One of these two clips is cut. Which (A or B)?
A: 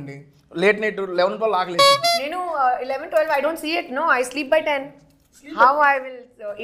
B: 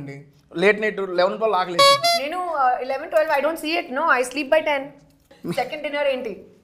B